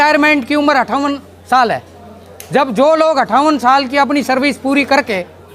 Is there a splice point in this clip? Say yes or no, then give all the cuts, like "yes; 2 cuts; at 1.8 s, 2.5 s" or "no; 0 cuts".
no; 0 cuts